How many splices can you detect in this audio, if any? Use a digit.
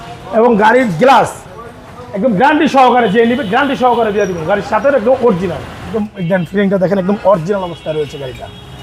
1